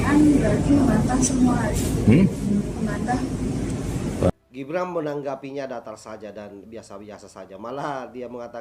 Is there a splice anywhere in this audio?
yes; 1 cut; at 4.3 s

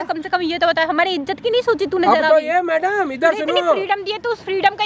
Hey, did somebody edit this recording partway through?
no; 0 cuts

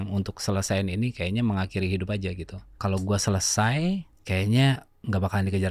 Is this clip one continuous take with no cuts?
no; 2 cuts; at 2.7 s, 4.1 s

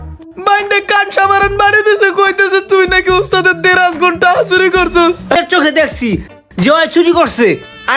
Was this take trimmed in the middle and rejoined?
yes; 1 cut; at 5.4 s

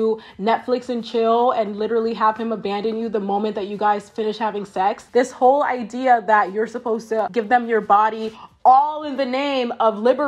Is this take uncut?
no; 1 cut; at 5.0 s

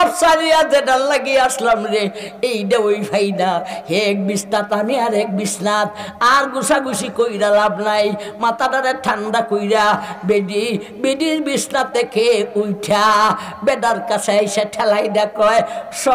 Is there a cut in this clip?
no; 0 cuts

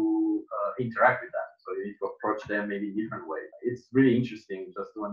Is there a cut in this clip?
yes; 1 cut; at 3.5 s

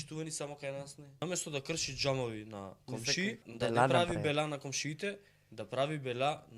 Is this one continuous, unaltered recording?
no; 2 cuts; at 1.2 s, 3.5 s

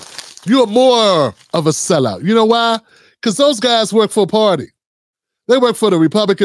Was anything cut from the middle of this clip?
no; 0 cuts

